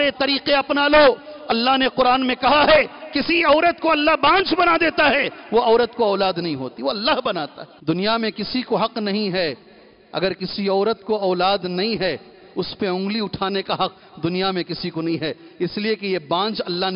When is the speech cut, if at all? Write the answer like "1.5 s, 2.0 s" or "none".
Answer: 7.6 s